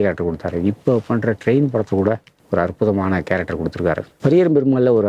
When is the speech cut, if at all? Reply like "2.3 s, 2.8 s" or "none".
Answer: 2.3 s, 4.1 s